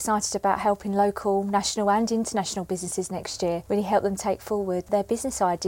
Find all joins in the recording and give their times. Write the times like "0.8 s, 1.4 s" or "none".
3.6 s, 4.9 s